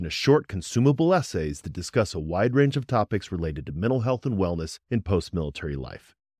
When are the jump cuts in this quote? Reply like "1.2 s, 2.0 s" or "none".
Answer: none